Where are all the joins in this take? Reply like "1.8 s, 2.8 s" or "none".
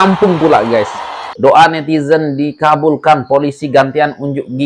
1.2 s